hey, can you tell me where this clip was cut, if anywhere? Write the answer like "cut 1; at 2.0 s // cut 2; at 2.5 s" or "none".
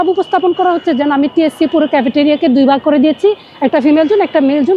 none

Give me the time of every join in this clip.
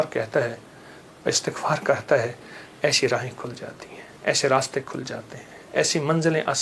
none

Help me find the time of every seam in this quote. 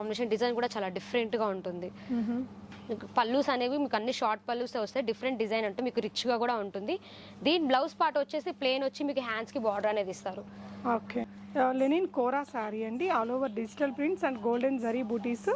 cut 1; at 2.7 s // cut 2; at 11.4 s

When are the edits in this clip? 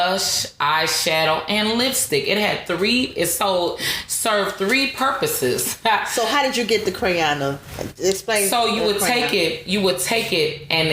none

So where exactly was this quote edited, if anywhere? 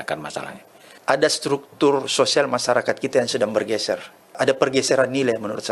cut 1; at 0.9 s // cut 2; at 4.4 s

